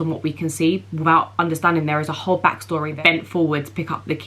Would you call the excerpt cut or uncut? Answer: cut